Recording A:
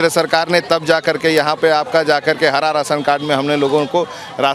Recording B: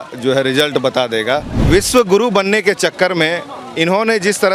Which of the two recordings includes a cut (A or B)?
B